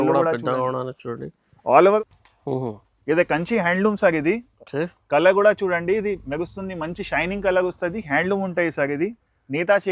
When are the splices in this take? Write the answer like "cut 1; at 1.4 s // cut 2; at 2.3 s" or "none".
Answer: cut 1; at 2.0 s